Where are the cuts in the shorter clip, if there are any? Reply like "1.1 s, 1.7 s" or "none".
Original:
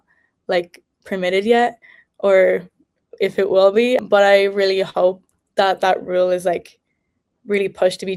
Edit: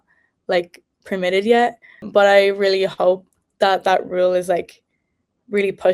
2.1 s